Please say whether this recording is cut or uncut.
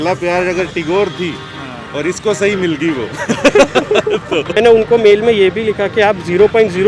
cut